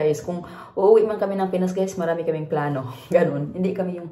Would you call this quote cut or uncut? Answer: uncut